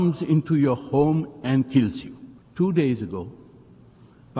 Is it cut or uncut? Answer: uncut